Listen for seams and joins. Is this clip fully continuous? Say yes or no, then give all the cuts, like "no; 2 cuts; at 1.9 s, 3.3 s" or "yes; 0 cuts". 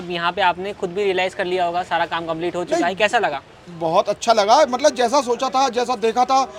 yes; 0 cuts